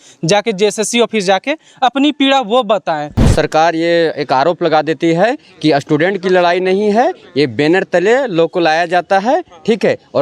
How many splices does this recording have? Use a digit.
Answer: 1